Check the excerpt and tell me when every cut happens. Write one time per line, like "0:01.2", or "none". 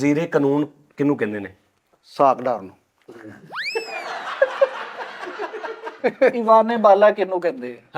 0:06.0